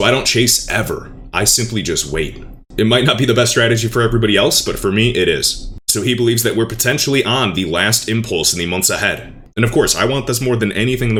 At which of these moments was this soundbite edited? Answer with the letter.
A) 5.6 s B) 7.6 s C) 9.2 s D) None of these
D